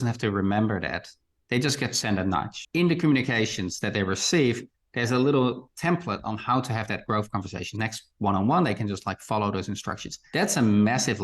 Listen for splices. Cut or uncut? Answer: cut